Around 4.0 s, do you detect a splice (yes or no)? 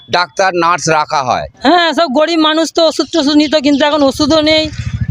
no